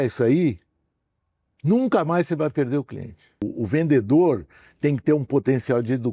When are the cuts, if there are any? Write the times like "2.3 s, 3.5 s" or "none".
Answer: 3.5 s